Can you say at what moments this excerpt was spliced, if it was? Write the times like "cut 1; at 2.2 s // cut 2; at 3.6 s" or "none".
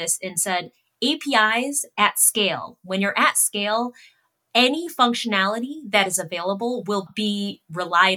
cut 1; at 7.1 s